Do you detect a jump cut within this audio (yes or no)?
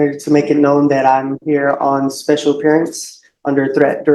no